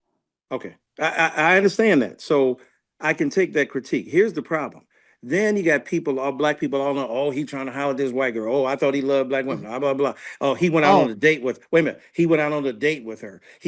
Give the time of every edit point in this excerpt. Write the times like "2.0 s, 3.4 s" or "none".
none